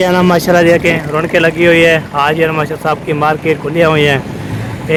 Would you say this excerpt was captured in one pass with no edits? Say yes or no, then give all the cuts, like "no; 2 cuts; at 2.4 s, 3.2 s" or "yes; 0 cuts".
yes; 0 cuts